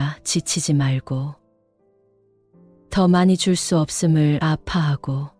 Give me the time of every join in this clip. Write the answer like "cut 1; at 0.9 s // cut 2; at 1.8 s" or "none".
cut 1; at 1.4 s // cut 2; at 2.9 s